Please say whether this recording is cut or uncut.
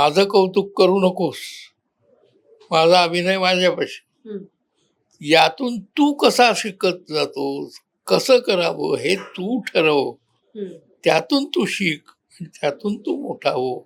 uncut